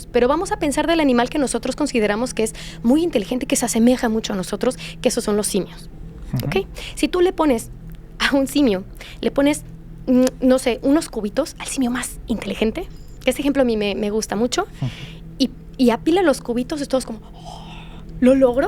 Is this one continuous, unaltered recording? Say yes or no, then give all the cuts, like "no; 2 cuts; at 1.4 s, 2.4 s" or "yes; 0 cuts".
yes; 0 cuts